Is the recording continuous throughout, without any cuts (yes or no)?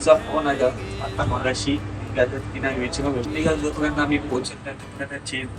no